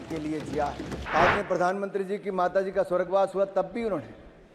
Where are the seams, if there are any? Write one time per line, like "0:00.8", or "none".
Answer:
0:00.9